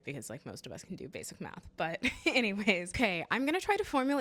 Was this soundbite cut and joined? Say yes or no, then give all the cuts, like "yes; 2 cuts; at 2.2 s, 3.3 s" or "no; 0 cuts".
yes; 1 cut; at 2.9 s